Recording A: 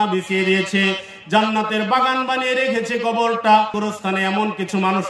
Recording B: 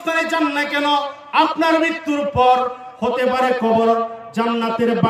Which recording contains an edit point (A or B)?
A